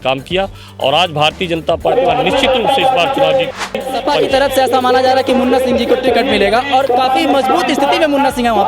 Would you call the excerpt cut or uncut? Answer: cut